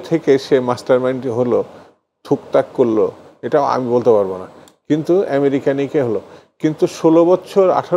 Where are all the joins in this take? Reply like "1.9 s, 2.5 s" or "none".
none